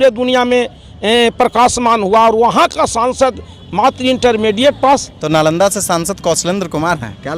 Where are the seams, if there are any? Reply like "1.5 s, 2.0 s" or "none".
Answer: 5.1 s